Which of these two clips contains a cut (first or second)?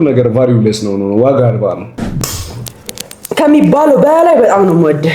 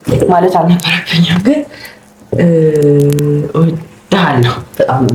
first